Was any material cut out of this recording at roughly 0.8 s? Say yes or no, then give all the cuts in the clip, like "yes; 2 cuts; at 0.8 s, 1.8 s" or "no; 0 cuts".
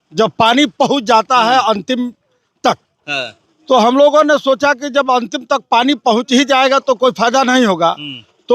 no; 0 cuts